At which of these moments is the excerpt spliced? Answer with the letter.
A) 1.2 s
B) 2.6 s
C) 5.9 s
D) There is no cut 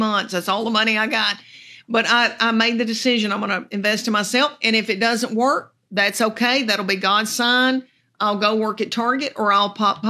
D